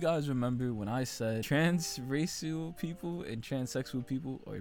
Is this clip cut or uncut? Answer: cut